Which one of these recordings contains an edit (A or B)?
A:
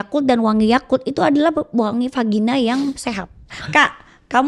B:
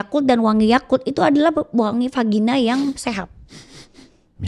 A